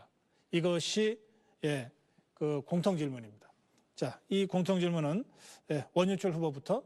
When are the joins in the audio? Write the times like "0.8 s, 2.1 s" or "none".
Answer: none

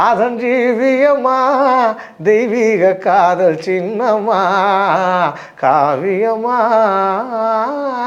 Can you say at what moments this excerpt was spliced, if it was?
none

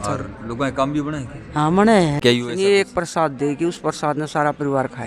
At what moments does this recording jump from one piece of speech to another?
2.2 s

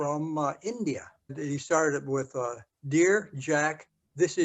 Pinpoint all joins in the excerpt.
1.4 s

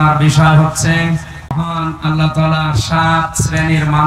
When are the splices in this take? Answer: 1.6 s

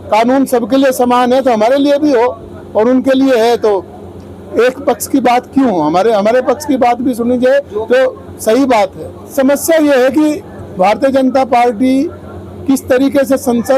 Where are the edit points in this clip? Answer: 9.3 s

